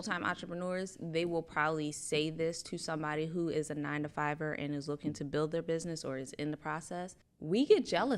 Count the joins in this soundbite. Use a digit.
1